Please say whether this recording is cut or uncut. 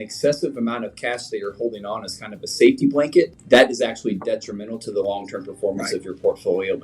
cut